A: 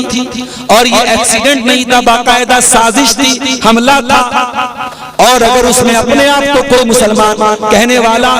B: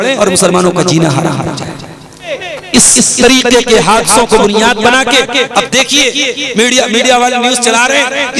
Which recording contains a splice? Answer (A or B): B